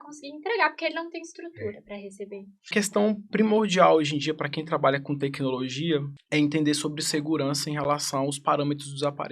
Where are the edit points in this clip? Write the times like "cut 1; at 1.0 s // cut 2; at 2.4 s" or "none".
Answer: cut 1; at 2.7 s // cut 2; at 6.2 s

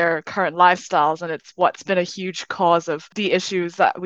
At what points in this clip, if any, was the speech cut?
cut 1; at 3.1 s

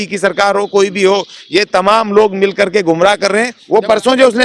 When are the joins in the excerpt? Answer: cut 1; at 3.6 s

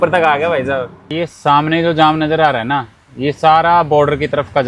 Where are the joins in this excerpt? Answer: cut 1; at 1.0 s

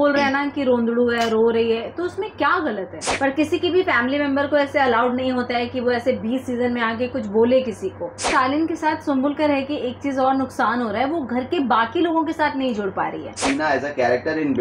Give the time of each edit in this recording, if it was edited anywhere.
cut 1; at 3.0 s // cut 2; at 8.3 s // cut 3; at 13.4 s

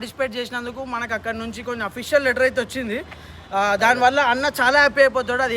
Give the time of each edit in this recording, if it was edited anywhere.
none

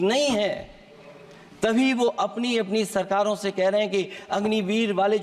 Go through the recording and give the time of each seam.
none

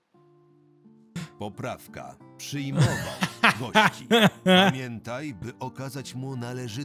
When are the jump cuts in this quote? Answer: none

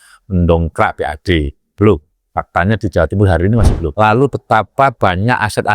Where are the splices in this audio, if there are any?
cut 1; at 3.8 s

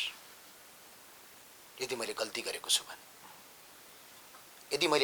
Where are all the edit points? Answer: none

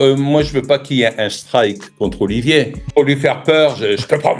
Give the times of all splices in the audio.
cut 1; at 2.8 s

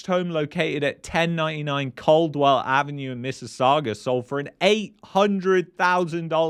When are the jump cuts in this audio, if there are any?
none

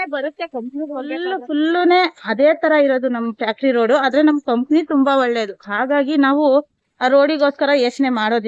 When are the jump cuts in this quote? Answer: cut 1; at 1.3 s

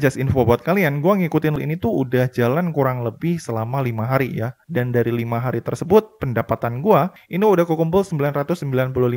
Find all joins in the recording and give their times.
cut 1; at 1.6 s

